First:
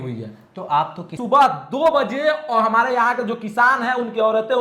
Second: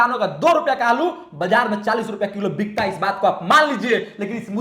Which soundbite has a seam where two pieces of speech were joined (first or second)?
first